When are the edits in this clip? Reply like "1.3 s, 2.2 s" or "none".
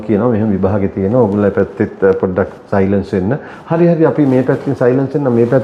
none